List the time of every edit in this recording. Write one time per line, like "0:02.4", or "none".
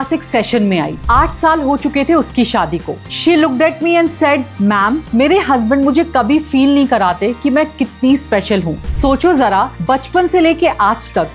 0:03.0
0:08.8